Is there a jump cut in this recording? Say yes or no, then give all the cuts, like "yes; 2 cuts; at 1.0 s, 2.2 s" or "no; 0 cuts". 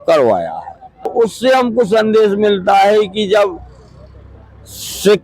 yes; 1 cut; at 1.1 s